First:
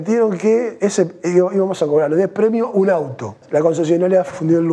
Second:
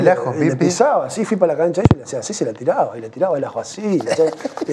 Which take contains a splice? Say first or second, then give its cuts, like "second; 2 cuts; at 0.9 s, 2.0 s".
first; 1 cut; at 3.4 s